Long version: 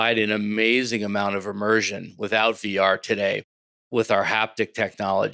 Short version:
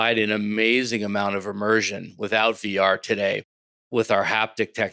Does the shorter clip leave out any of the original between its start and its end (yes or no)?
no